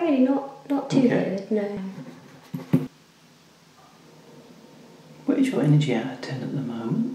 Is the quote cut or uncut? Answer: cut